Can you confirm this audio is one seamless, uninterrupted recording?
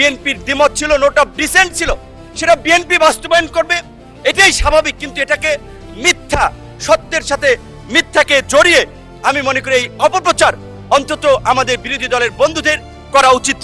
yes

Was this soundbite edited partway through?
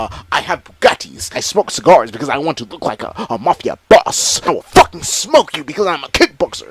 yes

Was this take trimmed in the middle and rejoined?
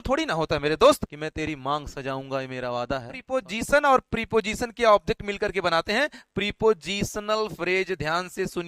yes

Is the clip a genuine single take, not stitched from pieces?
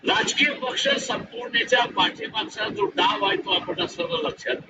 yes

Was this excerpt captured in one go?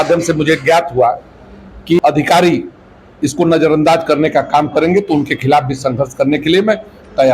no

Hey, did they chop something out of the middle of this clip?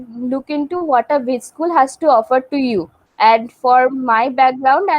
yes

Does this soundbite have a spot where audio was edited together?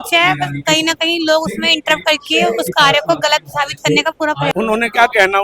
yes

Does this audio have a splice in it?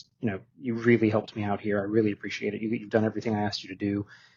no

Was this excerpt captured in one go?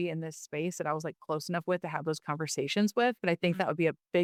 yes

